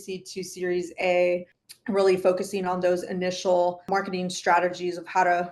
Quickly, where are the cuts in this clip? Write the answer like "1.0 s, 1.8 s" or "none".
1.6 s, 3.8 s